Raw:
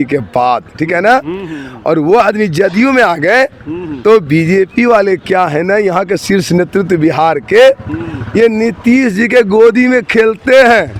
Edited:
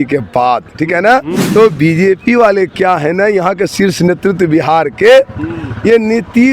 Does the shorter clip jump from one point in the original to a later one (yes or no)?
yes